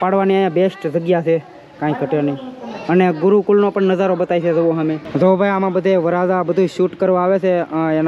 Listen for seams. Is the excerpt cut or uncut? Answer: cut